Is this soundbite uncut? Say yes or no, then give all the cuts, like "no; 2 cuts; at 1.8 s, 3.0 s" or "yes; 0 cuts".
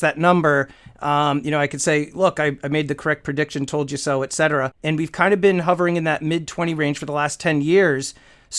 no; 1 cut; at 4.8 s